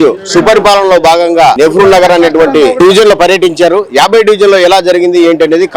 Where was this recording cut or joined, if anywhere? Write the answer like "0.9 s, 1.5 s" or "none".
1.6 s, 2.8 s